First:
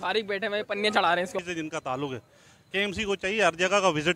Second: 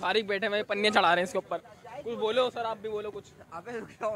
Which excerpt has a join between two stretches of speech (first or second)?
first